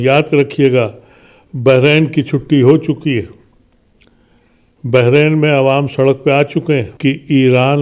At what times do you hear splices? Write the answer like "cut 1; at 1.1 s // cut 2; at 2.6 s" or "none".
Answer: cut 1; at 6.9 s